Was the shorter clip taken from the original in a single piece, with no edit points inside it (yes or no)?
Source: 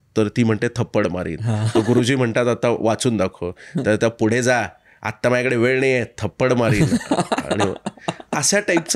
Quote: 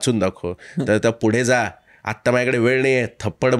yes